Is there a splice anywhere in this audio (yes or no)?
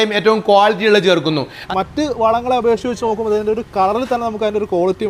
yes